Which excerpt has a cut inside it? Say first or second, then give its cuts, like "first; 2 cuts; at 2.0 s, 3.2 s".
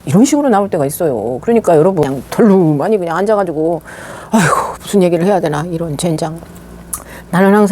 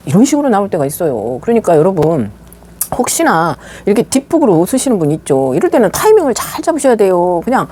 first; 1 cut; at 2.0 s